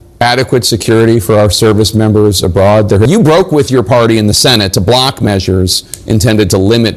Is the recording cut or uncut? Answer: cut